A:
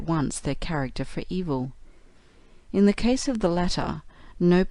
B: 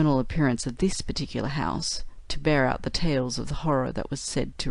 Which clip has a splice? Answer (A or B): B